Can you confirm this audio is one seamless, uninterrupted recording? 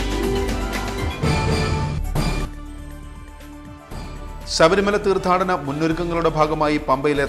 no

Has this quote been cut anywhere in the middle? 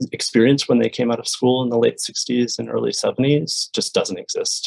no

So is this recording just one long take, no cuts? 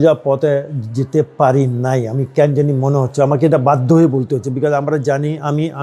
yes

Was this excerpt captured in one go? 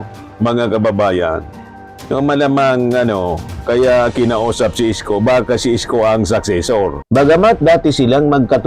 no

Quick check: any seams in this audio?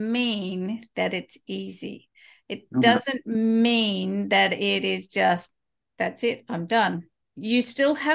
no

